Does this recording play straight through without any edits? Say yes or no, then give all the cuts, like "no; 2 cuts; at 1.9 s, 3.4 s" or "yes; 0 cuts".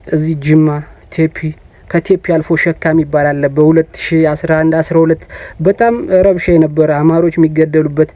yes; 0 cuts